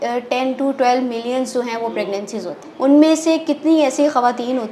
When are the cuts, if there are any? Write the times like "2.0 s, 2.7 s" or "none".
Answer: 2.6 s